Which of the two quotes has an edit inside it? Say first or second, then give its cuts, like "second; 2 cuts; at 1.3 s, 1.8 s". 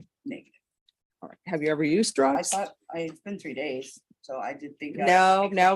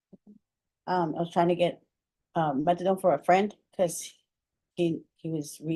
first; 1 cut; at 2.4 s